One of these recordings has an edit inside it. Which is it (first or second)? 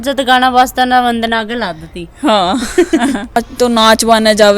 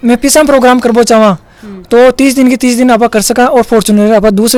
first